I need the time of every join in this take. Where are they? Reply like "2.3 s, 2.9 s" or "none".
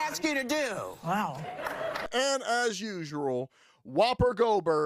2.0 s